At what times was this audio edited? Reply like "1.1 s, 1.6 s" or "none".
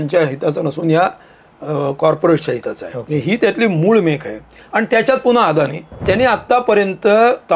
5.9 s